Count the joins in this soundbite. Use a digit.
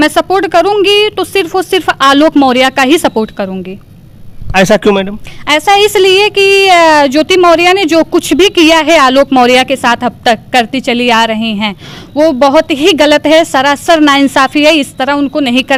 0